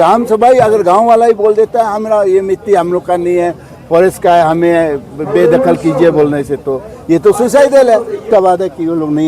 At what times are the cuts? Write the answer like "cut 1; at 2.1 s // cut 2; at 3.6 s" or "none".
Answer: cut 1; at 8.2 s